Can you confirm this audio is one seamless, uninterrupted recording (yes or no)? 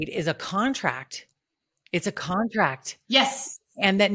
yes